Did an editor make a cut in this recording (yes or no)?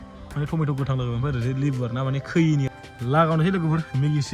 yes